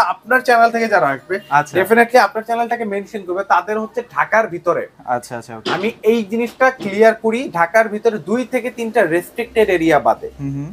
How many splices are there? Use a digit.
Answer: 0